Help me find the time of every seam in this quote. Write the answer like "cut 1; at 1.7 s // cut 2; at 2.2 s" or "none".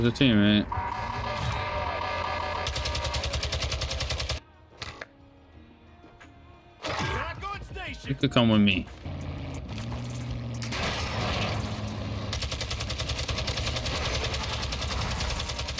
cut 1; at 4.4 s